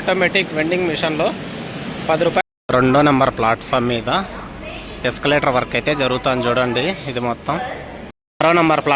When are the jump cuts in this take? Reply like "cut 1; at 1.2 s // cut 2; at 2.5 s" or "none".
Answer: cut 1; at 2.4 s // cut 2; at 8.0 s